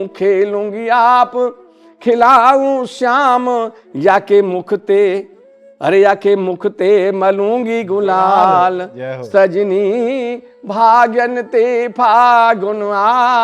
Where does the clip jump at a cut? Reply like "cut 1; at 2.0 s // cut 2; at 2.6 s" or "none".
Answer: none